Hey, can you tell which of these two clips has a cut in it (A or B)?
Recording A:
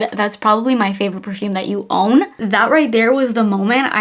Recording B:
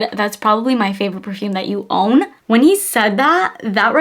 A